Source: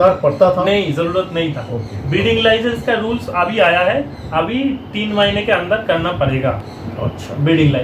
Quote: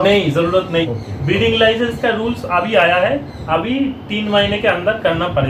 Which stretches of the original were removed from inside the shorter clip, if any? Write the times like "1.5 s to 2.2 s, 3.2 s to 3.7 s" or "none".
1.6 s to 1.8 s